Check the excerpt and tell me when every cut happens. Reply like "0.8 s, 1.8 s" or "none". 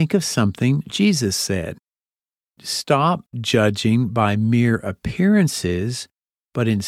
2.5 s